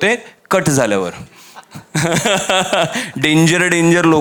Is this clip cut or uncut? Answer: uncut